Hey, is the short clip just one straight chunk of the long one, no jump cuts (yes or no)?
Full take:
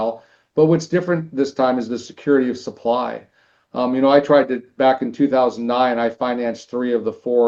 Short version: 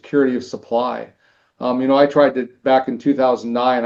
yes